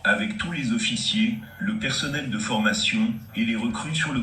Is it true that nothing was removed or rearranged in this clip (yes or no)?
yes